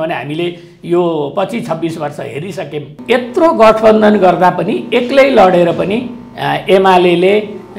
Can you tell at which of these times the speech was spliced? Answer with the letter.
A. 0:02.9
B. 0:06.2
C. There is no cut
A